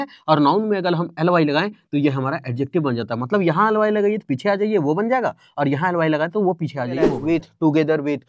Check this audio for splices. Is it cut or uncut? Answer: cut